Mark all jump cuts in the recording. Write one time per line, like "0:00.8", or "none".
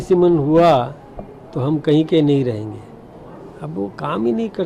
none